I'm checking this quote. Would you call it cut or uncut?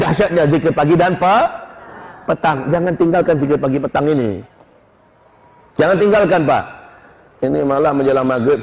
uncut